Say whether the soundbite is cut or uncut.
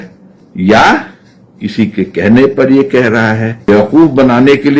cut